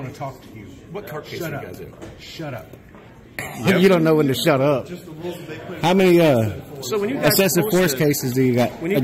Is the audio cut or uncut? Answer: cut